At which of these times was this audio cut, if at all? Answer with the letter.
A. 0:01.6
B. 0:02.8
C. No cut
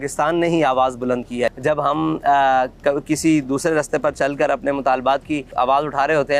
A